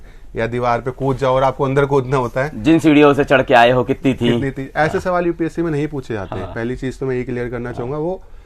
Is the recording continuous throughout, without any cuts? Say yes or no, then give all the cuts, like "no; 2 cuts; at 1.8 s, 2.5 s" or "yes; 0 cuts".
yes; 0 cuts